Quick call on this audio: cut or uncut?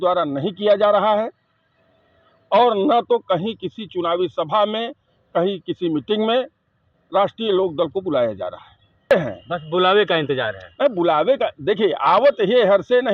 cut